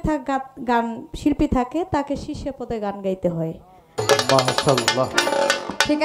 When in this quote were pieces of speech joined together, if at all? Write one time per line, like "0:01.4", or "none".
0:03.9